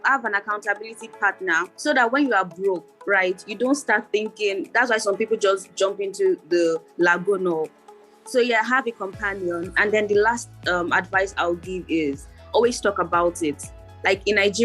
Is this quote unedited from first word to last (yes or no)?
no